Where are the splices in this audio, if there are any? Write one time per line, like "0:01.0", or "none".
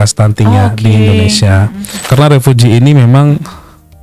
0:02.0